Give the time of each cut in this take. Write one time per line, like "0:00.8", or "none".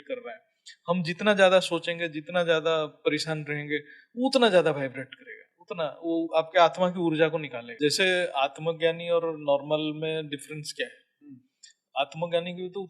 0:07.6